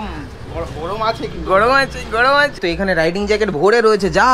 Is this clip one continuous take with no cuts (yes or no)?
no